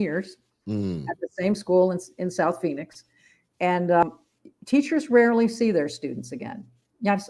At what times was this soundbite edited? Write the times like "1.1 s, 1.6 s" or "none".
4.0 s